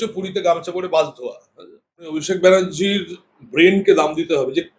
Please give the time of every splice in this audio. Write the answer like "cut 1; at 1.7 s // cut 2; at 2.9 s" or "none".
cut 1; at 1.9 s